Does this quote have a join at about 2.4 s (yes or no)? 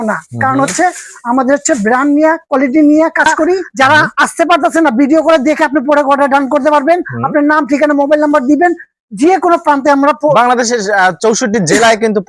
no